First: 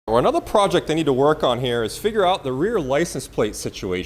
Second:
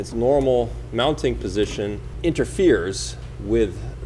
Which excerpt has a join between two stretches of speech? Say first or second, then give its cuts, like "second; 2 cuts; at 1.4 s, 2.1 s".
second; 1 cut; at 2.1 s